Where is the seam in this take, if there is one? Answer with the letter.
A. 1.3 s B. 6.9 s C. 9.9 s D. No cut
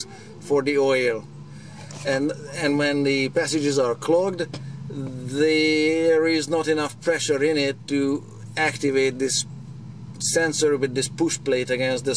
D